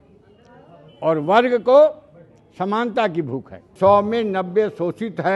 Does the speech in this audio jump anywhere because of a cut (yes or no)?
yes